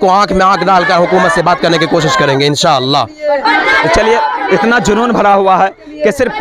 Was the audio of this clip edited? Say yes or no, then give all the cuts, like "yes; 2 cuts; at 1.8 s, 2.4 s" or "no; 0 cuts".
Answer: no; 0 cuts